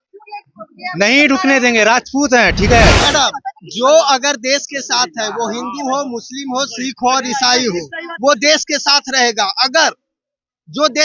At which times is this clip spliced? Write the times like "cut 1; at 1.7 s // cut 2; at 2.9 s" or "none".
cut 1; at 3.0 s